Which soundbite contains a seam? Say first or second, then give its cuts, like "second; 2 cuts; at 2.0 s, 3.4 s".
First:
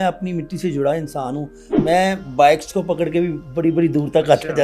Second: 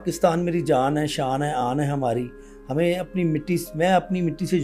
first; 1 cut; at 1.7 s